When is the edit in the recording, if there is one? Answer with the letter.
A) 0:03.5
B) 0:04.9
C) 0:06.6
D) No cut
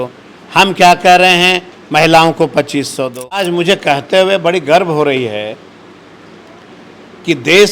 A